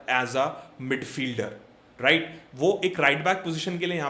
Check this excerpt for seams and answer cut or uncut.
uncut